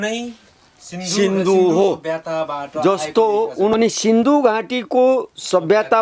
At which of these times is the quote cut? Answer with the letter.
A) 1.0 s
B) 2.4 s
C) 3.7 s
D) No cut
C